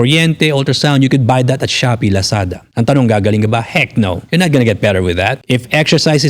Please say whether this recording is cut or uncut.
cut